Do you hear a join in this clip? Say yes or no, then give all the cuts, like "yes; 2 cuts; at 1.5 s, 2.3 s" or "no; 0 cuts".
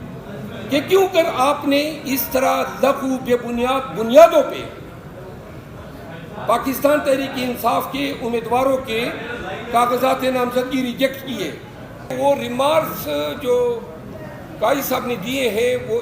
yes; 1 cut; at 12.1 s